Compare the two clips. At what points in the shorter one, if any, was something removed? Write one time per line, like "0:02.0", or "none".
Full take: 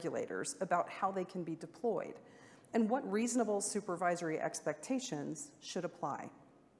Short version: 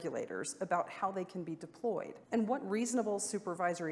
0:02.2

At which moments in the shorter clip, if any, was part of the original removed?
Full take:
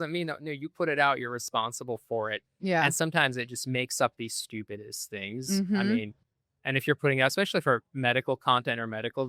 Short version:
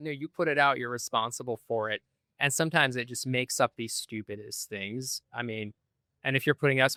none

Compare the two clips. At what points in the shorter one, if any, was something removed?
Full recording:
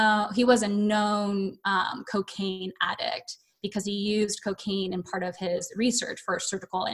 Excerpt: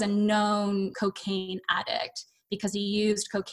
0:00.9

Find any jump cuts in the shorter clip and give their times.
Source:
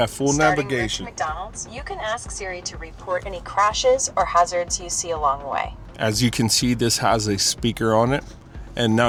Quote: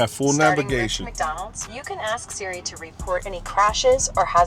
none

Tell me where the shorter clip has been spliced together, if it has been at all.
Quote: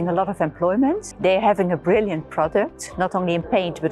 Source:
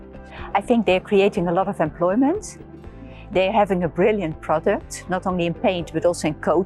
0:01.1

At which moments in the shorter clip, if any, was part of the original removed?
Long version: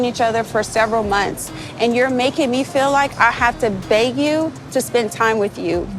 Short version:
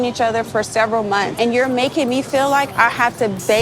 0:01.3

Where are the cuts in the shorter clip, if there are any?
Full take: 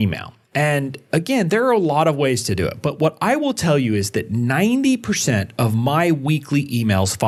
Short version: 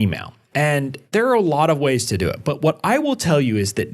0:01.1

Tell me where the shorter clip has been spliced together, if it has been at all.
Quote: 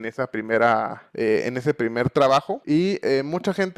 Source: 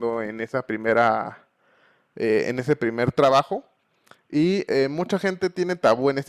0:01.0
0:02.6

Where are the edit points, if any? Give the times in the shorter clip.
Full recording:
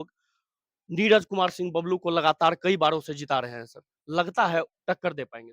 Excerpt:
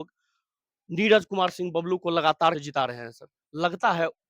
0:02.6

